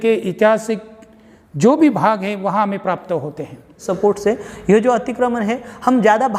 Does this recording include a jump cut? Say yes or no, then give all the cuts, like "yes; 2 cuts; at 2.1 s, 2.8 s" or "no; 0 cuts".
yes; 1 cut; at 3.8 s